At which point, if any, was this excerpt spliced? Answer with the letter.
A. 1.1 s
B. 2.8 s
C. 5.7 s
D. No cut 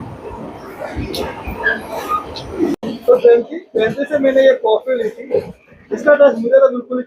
B